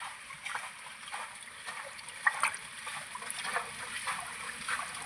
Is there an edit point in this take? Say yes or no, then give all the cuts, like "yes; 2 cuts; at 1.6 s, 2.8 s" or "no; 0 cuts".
no; 0 cuts